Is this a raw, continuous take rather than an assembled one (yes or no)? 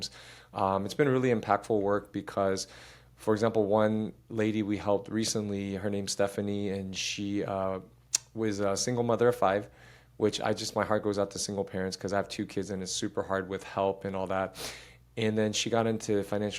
yes